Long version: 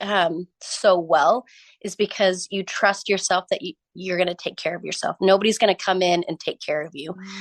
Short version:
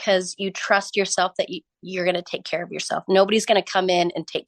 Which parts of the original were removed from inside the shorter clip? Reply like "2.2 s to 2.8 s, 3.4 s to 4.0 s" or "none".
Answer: none

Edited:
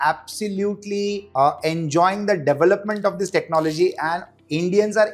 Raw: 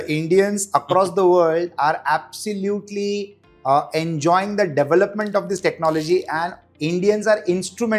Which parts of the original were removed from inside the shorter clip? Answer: 3.3 s to 3.5 s

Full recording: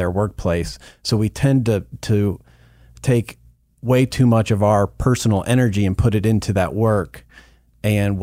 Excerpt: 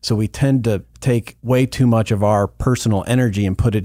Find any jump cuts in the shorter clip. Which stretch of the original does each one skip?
2.0 s to 3.3 s

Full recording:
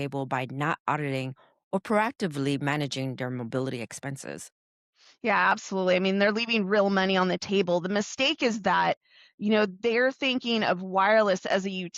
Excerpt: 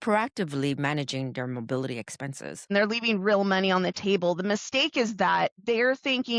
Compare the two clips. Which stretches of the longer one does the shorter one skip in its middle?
4.5 s to 6.2 s, 9.0 s to 9.7 s

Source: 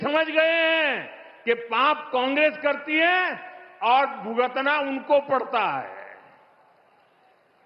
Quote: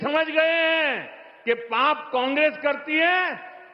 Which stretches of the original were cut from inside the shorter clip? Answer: none

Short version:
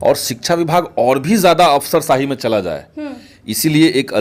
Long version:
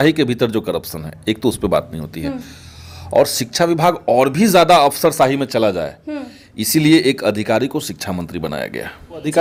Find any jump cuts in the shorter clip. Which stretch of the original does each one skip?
none

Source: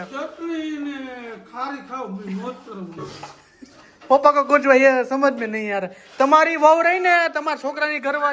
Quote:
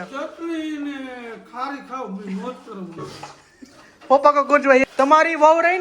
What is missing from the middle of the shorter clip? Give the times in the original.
4.8 s to 6.0 s

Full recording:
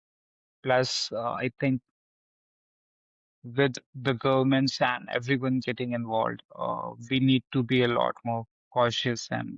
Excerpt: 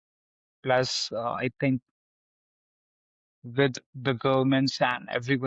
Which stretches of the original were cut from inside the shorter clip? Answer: none

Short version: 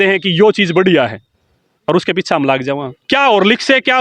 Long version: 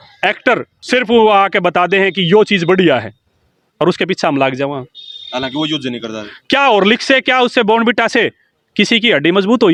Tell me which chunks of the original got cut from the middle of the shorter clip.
4.9 s to 6.3 s

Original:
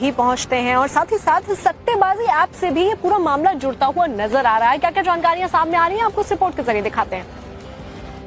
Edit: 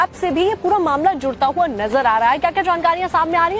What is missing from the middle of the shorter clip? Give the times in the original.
none

